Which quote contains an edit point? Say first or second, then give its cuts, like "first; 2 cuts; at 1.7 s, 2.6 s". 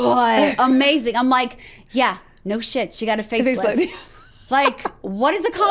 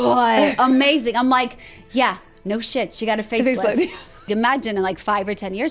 second; 1 cut; at 4.3 s